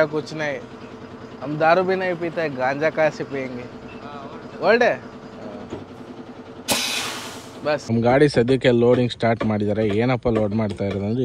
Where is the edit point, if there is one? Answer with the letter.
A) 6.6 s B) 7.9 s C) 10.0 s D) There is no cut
B